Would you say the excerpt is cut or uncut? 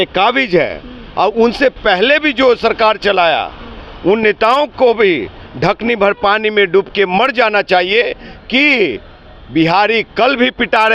uncut